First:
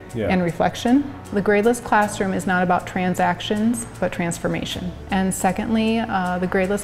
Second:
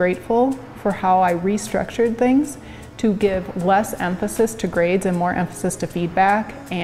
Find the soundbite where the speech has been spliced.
first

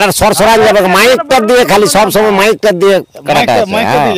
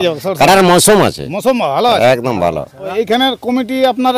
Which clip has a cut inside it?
second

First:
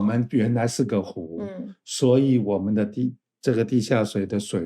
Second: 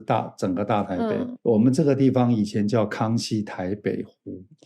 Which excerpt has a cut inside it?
second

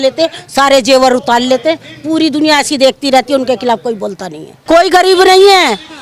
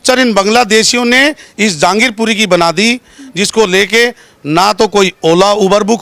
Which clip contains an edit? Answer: first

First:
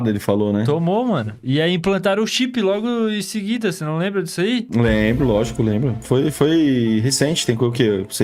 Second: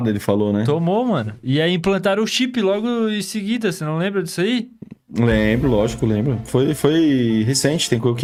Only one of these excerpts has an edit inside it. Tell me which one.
first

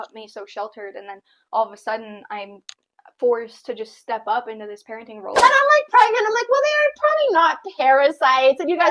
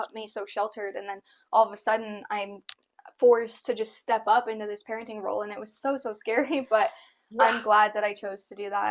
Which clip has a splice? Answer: first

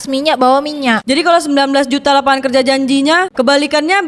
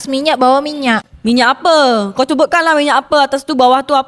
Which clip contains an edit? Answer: first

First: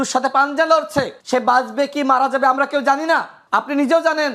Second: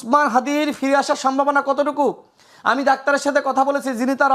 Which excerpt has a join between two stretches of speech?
first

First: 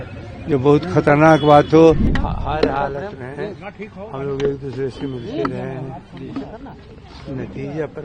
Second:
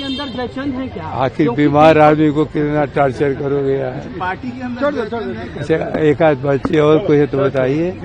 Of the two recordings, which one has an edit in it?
first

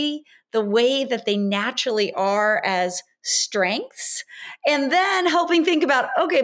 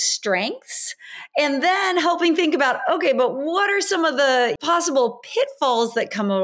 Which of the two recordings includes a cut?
second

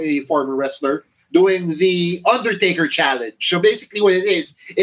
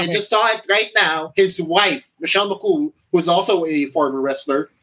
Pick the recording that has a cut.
second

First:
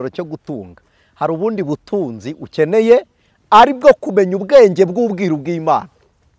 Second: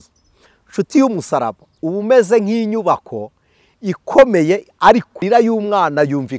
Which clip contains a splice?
second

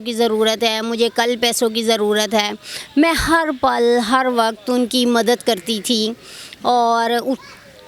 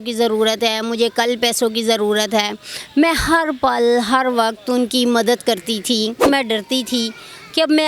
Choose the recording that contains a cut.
second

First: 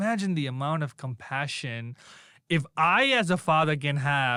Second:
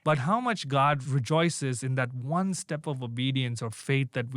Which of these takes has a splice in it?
second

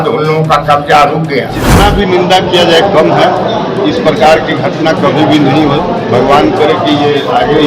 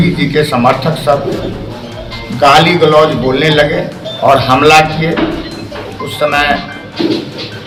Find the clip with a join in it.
first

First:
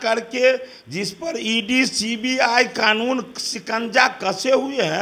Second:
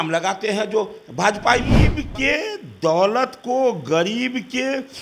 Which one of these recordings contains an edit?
second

